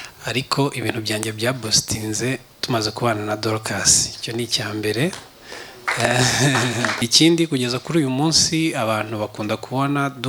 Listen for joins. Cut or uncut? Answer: cut